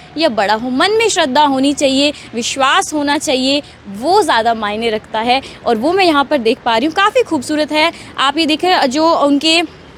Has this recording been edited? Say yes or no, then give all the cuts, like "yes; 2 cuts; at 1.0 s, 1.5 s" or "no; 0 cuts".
no; 0 cuts